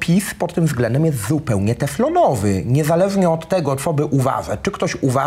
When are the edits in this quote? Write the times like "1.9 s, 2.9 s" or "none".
none